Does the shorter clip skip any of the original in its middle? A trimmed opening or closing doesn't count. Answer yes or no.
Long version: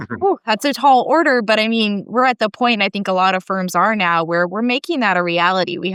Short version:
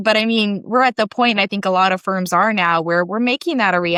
no